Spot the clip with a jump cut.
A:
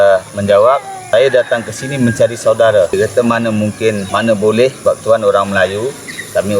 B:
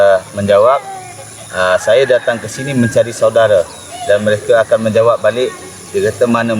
A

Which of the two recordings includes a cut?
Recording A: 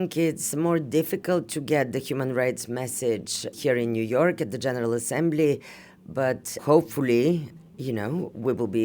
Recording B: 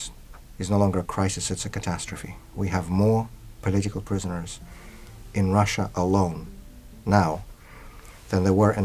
A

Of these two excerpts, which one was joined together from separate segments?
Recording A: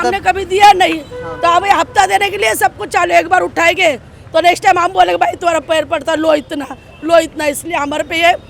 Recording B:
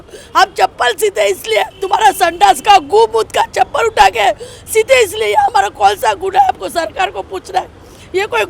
B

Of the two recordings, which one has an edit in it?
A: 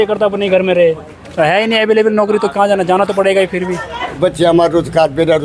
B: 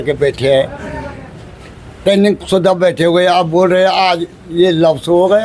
A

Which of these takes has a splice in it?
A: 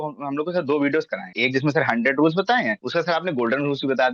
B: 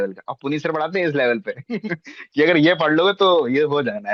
A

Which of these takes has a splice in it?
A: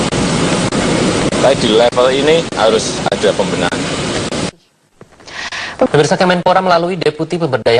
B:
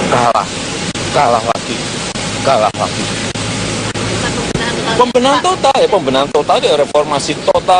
B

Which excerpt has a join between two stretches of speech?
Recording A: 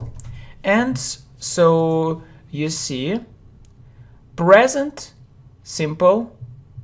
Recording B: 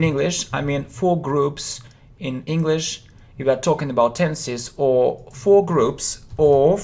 B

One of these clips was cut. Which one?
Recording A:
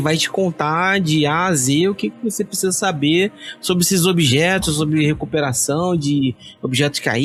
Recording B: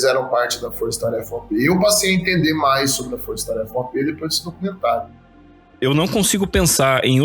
B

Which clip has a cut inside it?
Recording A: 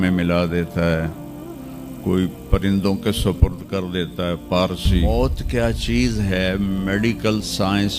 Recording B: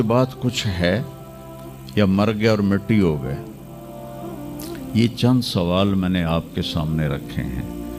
A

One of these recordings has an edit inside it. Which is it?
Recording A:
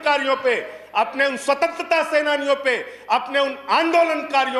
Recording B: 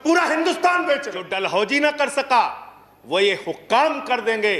B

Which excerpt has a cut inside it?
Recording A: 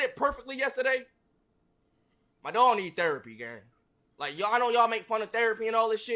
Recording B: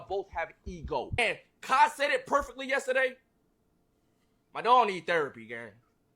B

